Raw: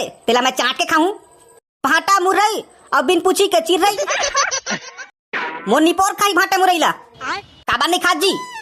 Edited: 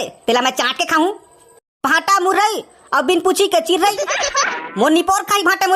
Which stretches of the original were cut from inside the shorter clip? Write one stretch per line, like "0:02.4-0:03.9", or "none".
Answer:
0:04.6-0:05.5